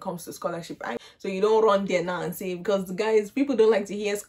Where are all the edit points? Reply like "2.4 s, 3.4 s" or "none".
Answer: 1.0 s